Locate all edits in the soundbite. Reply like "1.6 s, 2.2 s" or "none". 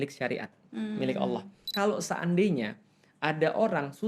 1.7 s